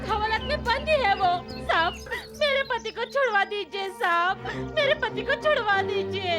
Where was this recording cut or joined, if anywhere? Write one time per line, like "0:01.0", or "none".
none